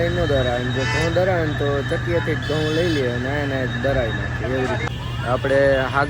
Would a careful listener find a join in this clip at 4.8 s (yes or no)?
yes